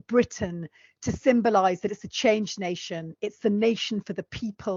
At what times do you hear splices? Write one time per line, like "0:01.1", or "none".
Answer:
none